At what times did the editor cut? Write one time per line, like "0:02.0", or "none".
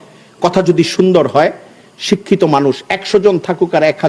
none